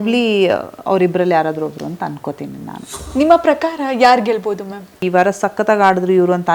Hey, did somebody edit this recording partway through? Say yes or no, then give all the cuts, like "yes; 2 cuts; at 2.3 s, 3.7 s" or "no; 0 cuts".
yes; 2 cuts; at 3.0 s, 5.0 s